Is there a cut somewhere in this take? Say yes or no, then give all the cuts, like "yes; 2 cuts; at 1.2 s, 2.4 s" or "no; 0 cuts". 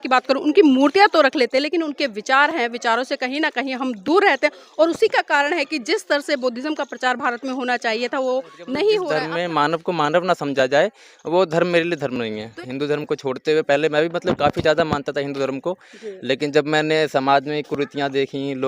yes; 2 cuts; at 9.1 s, 12.5 s